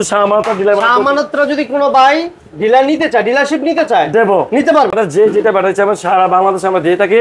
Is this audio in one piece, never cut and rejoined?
no; 1 cut; at 4.9 s

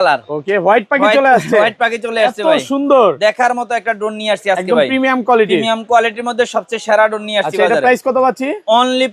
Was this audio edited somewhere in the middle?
no; 0 cuts

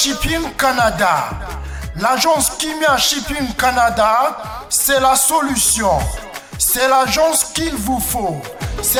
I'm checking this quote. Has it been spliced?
no; 0 cuts

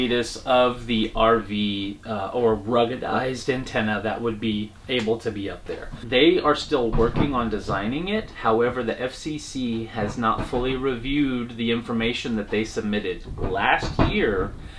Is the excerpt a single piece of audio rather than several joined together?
yes; 0 cuts

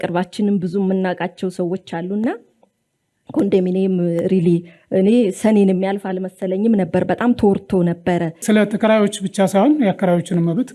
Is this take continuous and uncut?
no; 1 cut; at 8.4 s

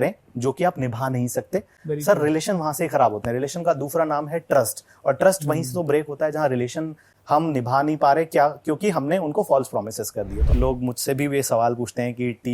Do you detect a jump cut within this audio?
yes; 1 cut; at 10.4 s

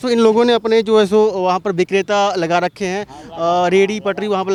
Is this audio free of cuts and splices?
yes; 0 cuts

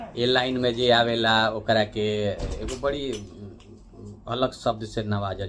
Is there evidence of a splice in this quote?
no; 0 cuts

